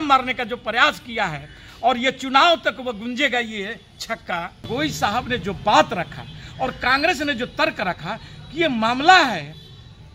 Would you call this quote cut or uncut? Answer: cut